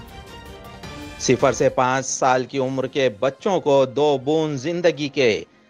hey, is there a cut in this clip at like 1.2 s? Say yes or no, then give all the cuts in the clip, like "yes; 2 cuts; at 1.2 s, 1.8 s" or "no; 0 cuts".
yes; 1 cut; at 1.2 s